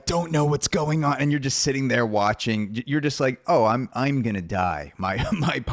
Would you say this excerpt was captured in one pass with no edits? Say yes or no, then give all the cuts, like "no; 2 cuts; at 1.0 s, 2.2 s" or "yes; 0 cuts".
yes; 0 cuts